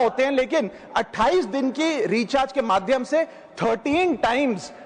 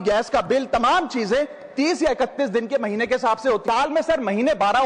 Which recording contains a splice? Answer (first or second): second